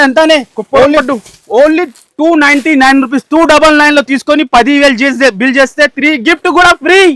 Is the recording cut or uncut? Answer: uncut